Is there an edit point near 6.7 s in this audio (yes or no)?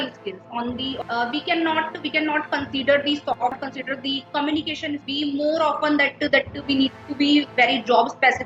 no